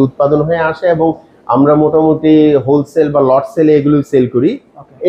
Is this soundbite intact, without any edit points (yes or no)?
yes